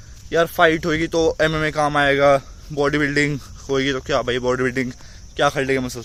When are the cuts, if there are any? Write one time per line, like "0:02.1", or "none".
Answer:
none